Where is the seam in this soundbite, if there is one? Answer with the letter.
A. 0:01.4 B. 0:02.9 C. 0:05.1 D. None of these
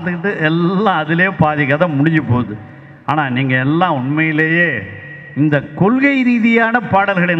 D